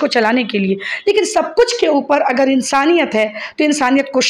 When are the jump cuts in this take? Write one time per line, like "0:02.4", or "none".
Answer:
none